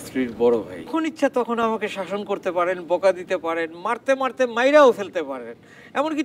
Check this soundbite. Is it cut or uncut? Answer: cut